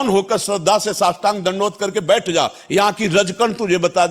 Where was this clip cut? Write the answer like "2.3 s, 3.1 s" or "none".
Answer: none